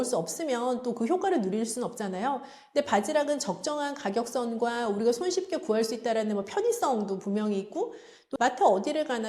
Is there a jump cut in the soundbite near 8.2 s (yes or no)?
yes